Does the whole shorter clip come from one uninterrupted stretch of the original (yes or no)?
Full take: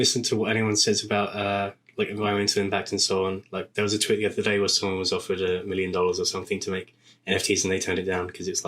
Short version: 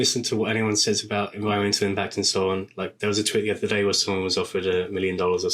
no